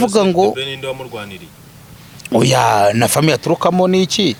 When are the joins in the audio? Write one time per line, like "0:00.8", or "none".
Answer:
none